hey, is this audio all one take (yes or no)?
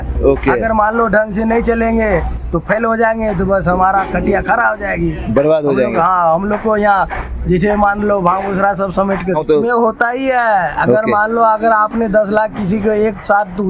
no